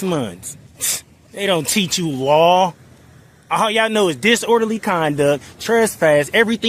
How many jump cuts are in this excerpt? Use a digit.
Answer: 0